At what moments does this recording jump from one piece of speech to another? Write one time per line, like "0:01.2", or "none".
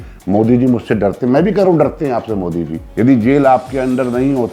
0:02.8